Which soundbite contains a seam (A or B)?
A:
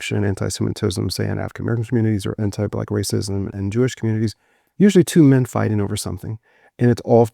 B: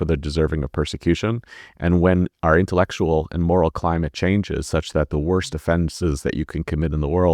A